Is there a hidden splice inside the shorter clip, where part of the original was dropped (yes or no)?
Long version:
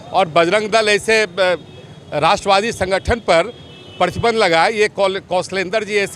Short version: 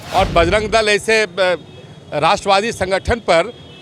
no